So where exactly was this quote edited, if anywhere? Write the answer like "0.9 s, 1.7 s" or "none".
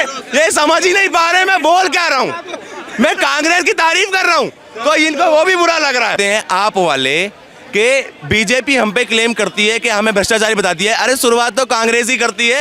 6.2 s